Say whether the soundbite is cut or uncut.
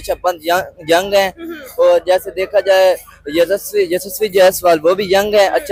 uncut